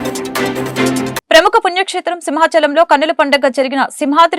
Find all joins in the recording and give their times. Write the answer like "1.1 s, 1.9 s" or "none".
1.1 s